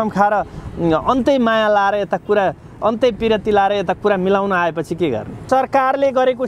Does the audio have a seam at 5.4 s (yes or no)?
yes